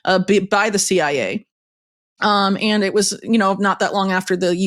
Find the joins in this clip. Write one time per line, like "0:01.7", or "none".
none